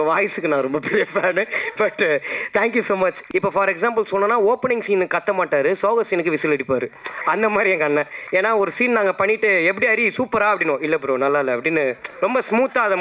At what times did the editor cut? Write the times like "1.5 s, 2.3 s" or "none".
3.2 s, 8.2 s